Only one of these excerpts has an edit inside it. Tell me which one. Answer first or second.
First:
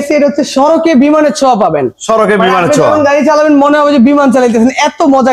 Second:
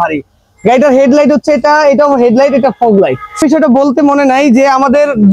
second